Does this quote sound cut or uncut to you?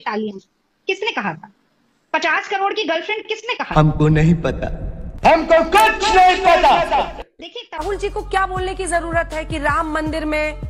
cut